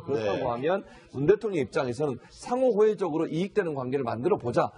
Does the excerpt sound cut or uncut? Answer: uncut